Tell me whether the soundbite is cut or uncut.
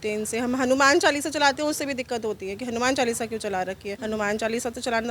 cut